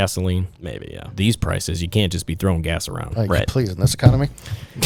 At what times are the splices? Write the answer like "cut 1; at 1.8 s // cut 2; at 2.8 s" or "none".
none